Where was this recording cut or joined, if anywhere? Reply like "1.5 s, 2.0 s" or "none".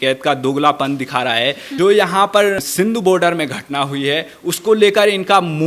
1.6 s, 2.6 s